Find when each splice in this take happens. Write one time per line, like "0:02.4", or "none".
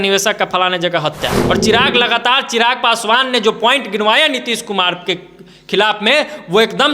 0:01.4